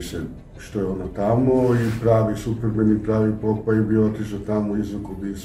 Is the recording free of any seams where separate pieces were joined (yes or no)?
yes